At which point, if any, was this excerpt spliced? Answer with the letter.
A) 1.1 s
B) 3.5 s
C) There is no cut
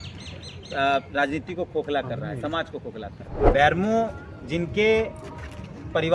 B